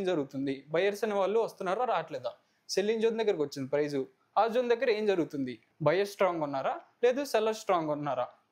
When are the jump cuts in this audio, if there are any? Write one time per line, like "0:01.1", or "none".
none